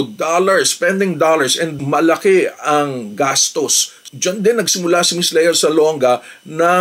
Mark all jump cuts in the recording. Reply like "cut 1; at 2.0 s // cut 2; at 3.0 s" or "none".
cut 1; at 1.8 s // cut 2; at 4.0 s